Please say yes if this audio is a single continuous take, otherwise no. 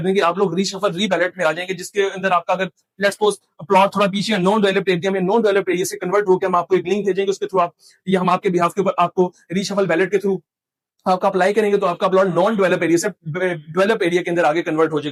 yes